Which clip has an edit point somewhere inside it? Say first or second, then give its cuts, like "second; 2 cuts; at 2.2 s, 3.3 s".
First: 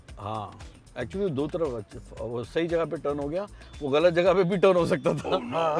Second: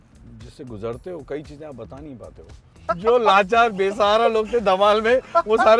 second; 1 cut; at 2.9 s